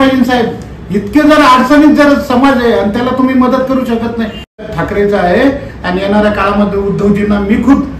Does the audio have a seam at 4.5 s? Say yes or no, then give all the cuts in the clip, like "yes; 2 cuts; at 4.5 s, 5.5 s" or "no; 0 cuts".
yes; 1 cut; at 4.5 s